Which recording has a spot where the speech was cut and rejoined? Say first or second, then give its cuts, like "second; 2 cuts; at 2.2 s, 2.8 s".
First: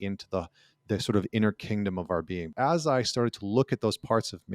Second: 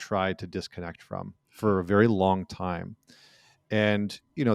first; 1 cut; at 2.5 s